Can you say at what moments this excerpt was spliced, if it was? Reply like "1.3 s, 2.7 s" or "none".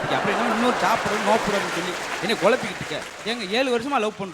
3.3 s